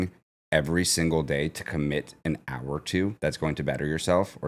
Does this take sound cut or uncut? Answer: cut